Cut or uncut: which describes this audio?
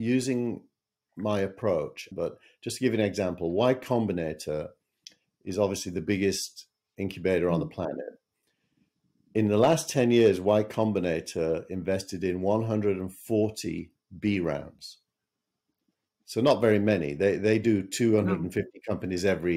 cut